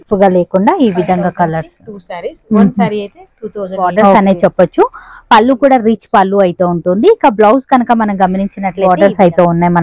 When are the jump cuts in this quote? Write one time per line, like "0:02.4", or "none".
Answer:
0:04.1
0:08.9

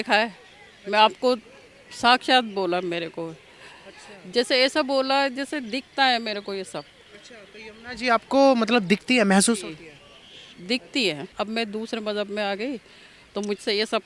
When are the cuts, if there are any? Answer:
0:11.3

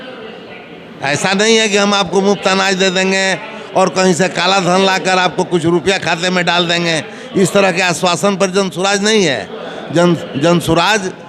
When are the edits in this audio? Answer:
none

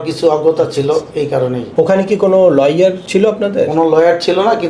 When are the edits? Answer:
0:01.6
0:03.0

